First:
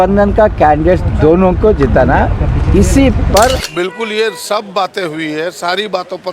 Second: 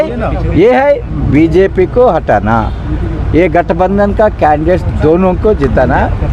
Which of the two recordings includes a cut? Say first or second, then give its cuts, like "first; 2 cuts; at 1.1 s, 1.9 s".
first; 1 cut; at 3.7 s